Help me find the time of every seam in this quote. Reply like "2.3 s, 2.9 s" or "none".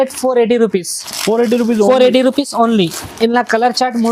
none